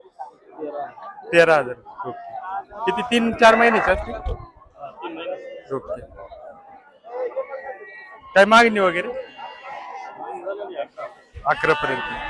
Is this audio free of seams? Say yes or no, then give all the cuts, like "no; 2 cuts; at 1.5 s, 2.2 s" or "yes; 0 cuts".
yes; 0 cuts